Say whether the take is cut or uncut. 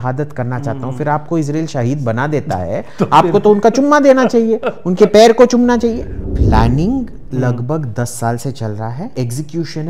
cut